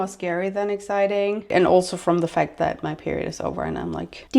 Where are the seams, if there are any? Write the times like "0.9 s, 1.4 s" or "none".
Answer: 1.5 s